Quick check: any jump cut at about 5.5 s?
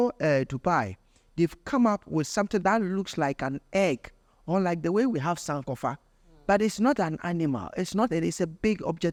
no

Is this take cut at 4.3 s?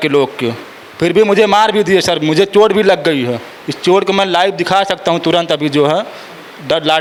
no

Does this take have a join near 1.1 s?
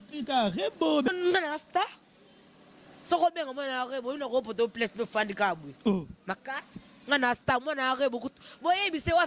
yes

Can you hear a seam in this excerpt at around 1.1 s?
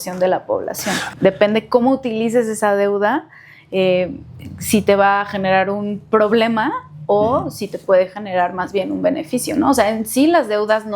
yes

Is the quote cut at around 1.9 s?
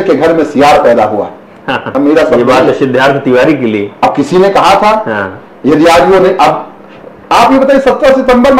yes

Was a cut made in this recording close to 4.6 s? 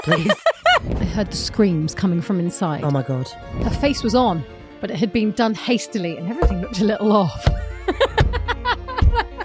no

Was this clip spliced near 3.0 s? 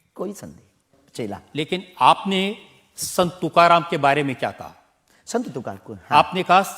no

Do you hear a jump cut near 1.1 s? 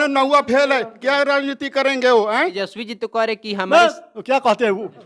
no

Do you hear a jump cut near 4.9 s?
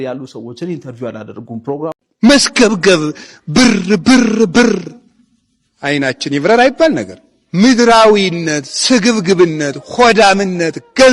no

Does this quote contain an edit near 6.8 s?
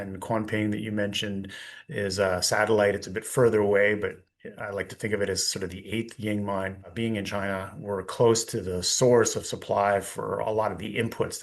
yes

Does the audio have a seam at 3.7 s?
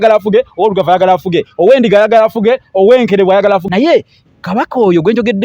yes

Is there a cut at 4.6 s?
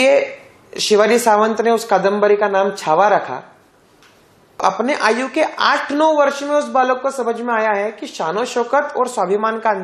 yes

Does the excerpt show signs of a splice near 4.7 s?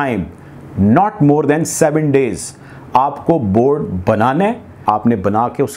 yes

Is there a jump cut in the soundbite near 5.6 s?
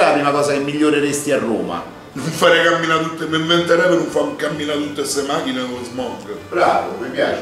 no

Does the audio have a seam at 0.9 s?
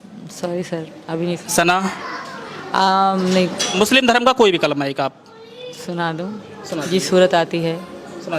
no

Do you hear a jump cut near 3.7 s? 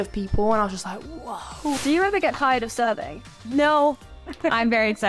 no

